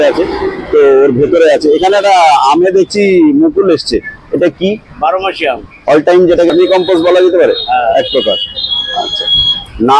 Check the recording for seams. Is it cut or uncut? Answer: cut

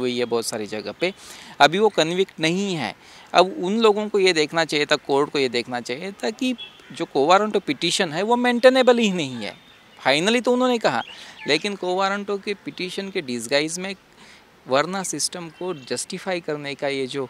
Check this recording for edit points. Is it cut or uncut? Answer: uncut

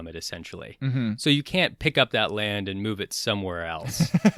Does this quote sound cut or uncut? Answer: uncut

